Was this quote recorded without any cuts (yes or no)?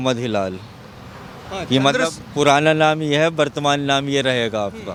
yes